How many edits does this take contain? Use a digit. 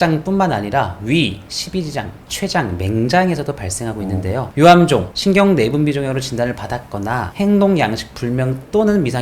1